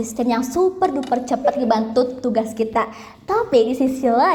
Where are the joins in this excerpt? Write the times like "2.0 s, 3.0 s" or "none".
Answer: none